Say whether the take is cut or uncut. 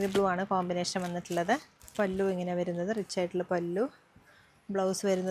uncut